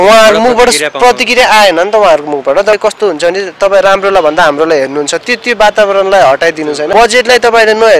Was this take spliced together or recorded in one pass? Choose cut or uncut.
cut